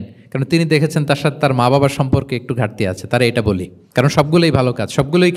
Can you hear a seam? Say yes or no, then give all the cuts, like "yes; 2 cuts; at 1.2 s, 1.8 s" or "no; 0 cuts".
yes; 1 cut; at 3.8 s